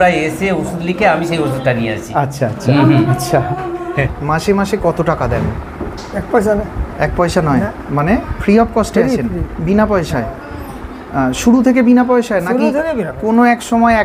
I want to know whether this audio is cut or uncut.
cut